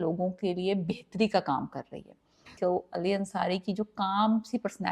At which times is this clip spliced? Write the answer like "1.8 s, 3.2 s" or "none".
2.5 s